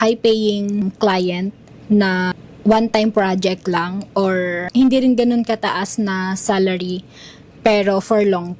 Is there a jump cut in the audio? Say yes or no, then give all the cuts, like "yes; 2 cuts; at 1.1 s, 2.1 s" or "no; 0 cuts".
yes; 4 cuts; at 0.8 s, 1.7 s, 2.4 s, 4.7 s